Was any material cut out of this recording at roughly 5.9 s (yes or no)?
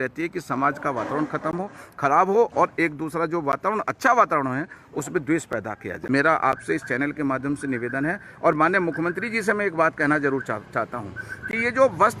yes